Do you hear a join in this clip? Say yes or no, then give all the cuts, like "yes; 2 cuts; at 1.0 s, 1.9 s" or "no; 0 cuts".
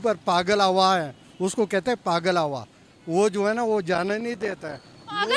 no; 0 cuts